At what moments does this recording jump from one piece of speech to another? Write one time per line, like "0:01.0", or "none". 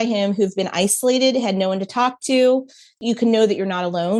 0:03.0